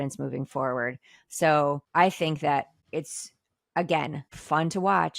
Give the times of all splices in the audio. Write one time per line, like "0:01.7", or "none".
0:01.8
0:02.8
0:04.3